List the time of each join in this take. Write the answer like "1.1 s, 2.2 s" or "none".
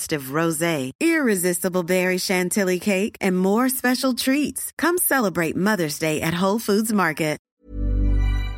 7.5 s